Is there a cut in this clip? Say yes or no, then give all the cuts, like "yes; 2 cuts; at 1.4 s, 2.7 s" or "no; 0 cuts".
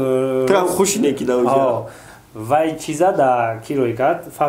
no; 0 cuts